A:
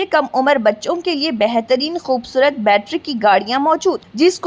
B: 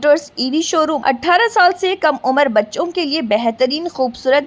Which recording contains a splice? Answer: B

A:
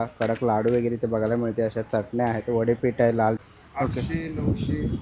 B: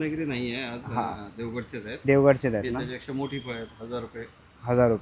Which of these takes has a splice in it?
A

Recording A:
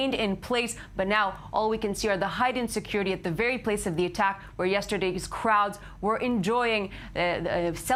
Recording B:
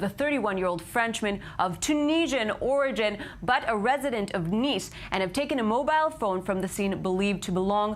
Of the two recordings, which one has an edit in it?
B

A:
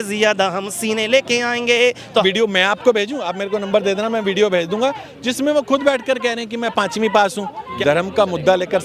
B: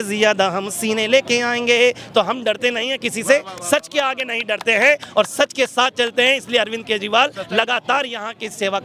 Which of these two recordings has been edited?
A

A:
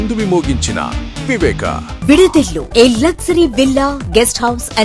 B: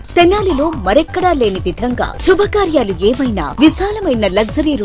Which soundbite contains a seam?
A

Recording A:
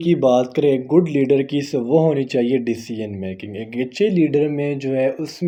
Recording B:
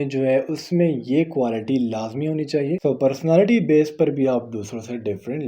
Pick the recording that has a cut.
B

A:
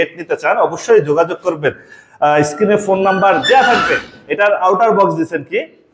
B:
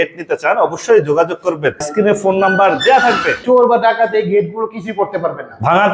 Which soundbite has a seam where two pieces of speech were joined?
B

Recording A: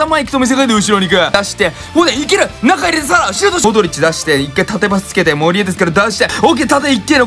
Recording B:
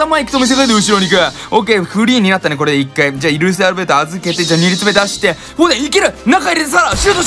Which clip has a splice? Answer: A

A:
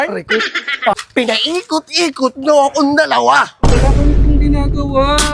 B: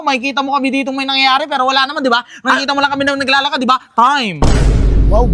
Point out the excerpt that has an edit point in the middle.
A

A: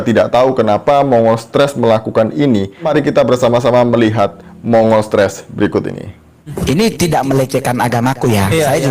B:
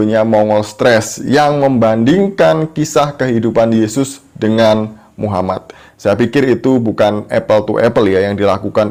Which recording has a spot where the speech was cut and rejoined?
A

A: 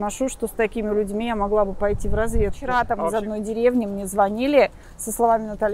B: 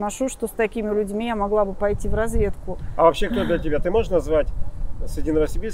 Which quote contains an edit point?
A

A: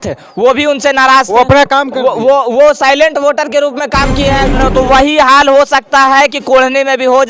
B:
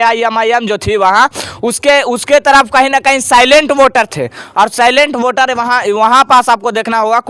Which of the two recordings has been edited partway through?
A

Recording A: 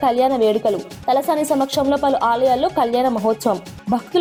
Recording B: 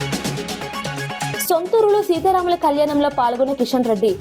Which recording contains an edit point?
B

